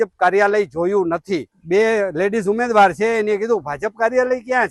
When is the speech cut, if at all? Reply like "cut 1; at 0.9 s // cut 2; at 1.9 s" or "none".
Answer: cut 1; at 1.5 s